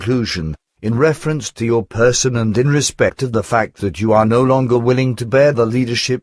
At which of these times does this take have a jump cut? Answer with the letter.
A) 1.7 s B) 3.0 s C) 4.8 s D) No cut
C